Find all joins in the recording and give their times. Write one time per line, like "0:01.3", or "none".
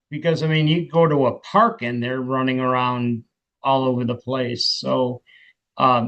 none